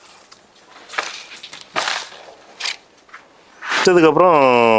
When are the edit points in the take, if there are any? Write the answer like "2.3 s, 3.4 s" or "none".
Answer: 3.8 s